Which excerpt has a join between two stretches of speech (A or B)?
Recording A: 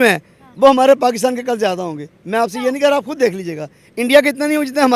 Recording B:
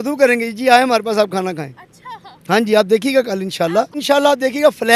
B